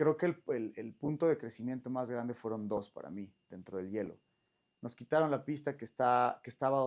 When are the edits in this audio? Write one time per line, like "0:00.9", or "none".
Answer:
0:04.6